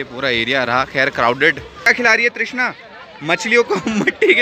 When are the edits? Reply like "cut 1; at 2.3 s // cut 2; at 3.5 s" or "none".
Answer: cut 1; at 1.9 s